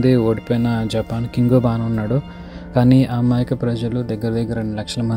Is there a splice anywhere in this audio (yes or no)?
no